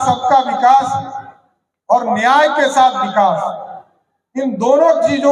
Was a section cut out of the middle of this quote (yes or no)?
no